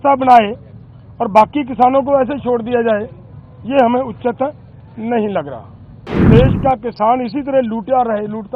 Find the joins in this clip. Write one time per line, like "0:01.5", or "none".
0:06.2